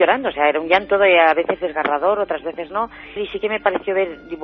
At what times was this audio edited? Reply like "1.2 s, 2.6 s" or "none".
3.0 s